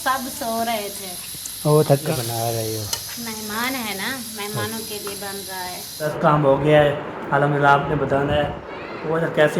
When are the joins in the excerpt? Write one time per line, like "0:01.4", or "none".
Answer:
0:02.0
0:06.1